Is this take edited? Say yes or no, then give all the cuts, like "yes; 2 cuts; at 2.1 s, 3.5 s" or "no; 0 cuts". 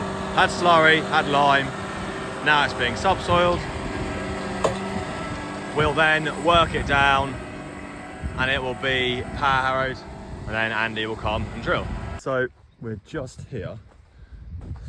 yes; 1 cut; at 12.1 s